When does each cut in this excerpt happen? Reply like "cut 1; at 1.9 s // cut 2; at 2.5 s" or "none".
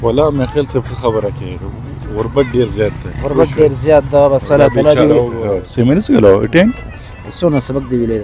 cut 1; at 5.6 s